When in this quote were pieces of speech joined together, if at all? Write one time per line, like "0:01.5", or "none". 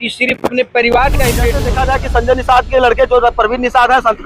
0:01.6